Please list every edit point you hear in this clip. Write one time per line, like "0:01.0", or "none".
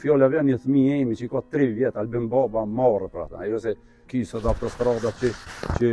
none